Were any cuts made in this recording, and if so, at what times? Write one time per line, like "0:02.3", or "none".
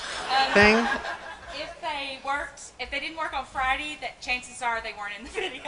none